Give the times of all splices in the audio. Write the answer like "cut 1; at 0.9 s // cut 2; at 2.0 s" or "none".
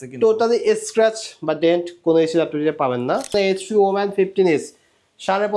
cut 1; at 3.3 s